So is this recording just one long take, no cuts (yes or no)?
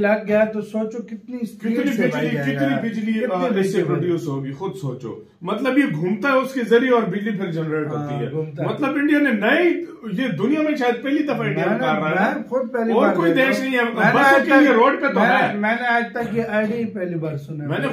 yes